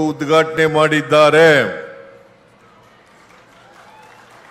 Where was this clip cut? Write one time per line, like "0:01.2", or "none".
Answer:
none

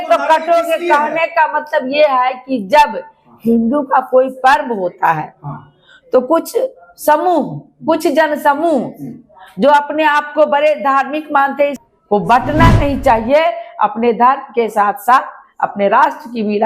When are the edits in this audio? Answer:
0:11.8

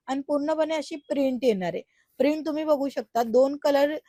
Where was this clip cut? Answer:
none

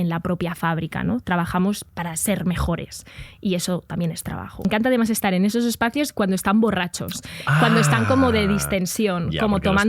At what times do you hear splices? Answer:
0:01.8
0:04.6

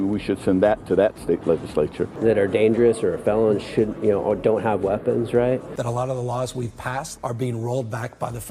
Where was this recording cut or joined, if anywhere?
0:02.2
0:05.8

